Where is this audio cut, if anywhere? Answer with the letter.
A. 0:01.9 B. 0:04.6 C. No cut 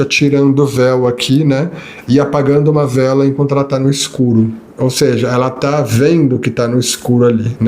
B